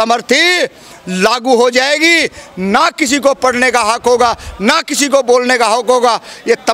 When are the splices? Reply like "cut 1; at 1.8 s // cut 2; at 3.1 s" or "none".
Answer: none